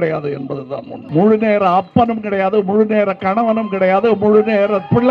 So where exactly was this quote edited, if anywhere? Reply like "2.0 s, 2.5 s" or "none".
1.0 s